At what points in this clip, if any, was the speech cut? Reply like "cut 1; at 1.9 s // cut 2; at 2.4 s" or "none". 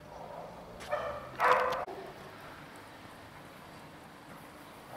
cut 1; at 1.9 s